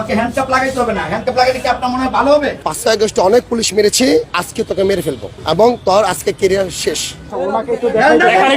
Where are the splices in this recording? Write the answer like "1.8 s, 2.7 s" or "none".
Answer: 2.6 s, 4.4 s, 5.3 s, 7.3 s